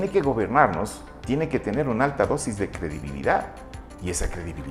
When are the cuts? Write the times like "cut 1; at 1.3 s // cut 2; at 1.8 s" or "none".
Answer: none